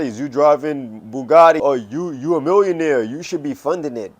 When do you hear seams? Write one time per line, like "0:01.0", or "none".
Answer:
0:01.6